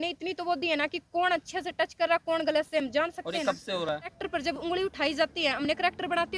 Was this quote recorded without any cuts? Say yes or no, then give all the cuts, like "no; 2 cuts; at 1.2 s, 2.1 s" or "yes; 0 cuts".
no; 1 cut; at 4.2 s